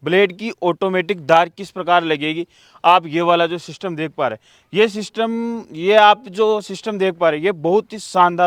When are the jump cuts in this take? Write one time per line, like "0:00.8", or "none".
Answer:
none